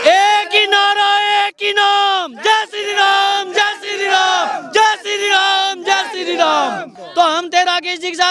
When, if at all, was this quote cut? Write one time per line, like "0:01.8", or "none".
0:07.0

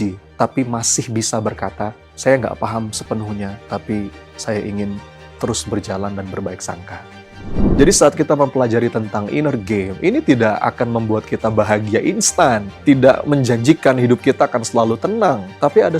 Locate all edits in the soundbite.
0:07.7

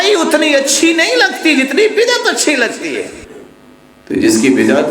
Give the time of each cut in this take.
0:03.2

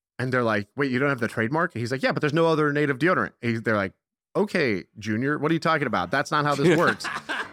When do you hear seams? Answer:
none

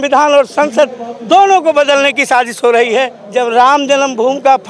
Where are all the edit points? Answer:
0:03.2

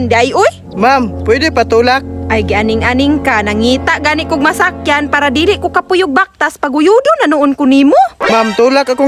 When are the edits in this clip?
none

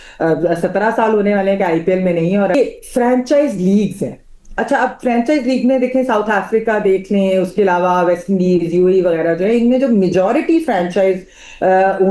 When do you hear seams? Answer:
0:02.5

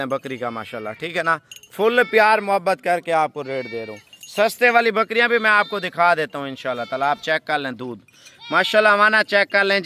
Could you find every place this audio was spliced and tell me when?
none

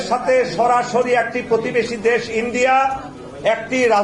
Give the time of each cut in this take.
none

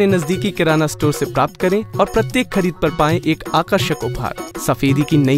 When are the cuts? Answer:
0:04.4

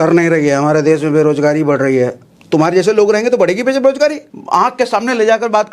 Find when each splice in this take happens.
0:04.3

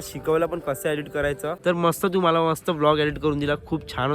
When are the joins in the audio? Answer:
0:01.6

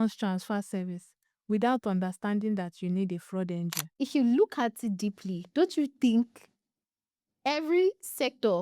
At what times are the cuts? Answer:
0:03.8

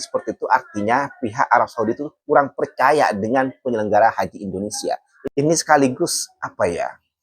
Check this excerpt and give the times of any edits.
0:05.1

